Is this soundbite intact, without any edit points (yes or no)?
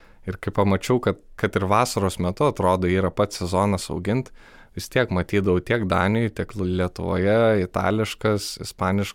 no